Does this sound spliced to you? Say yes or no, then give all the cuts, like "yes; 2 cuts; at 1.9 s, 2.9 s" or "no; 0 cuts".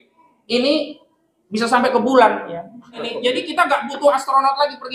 yes; 1 cut; at 3.0 s